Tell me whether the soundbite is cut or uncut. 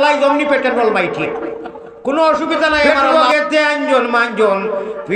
cut